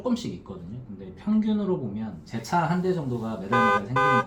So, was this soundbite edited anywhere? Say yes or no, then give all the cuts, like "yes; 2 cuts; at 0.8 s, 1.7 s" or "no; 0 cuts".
no; 0 cuts